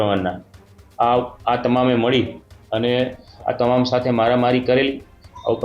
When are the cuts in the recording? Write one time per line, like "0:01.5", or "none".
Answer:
0:03.2